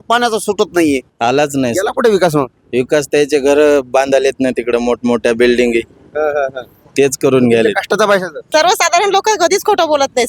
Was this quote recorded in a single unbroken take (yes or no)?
no